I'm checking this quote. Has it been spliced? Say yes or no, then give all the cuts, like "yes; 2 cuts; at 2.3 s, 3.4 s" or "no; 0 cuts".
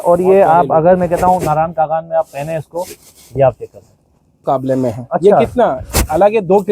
yes; 1 cut; at 4.4 s